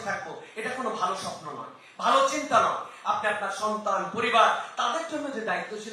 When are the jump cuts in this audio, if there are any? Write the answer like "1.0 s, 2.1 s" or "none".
none